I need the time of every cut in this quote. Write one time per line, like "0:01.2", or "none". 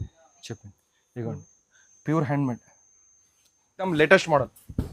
0:03.9

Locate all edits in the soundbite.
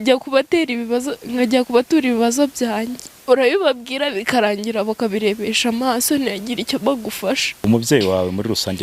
0:03.1
0:07.5

